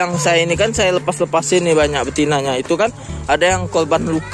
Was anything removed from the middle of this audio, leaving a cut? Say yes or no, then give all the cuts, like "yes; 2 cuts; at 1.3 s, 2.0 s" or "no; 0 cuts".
no; 0 cuts